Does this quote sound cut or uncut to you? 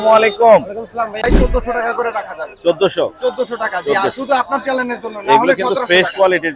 cut